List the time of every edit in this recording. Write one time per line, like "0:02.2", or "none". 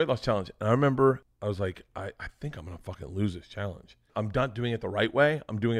0:01.3
0:04.1